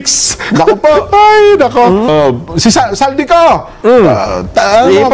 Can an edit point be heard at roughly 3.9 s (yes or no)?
no